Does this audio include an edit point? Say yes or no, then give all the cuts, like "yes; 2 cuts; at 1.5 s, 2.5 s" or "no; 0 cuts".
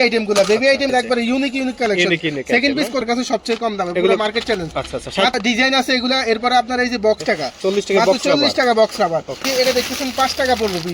yes; 5 cuts; at 0.9 s, 3.0 s, 5.4 s, 7.2 s, 9.4 s